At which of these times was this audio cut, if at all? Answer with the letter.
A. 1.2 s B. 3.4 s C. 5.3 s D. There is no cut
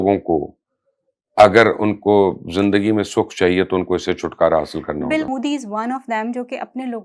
C